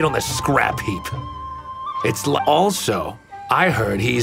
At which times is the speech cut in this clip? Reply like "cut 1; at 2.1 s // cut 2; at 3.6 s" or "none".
cut 1; at 2.4 s

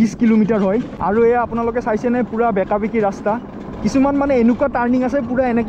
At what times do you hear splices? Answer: cut 1; at 1.0 s

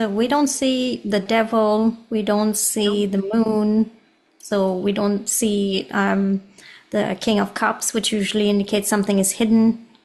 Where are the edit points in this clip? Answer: none

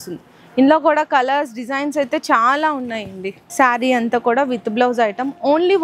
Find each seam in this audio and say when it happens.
cut 1; at 3.4 s

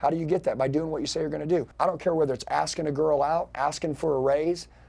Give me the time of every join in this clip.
cut 1; at 1.7 s

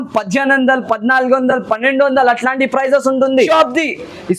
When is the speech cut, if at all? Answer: cut 1; at 3.5 s

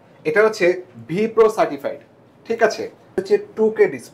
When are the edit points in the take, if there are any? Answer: cut 1; at 3.2 s

